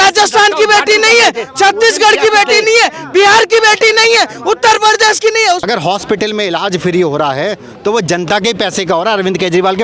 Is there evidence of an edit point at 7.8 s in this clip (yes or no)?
no